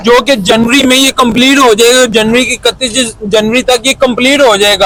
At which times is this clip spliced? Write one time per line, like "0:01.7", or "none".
none